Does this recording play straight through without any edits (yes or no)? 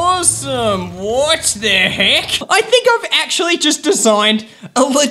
no